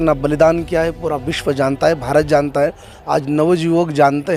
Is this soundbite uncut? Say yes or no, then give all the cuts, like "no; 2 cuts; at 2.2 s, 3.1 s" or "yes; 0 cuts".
yes; 0 cuts